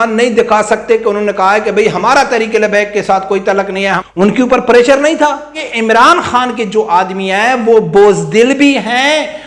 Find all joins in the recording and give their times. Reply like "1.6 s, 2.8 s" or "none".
4.0 s, 5.6 s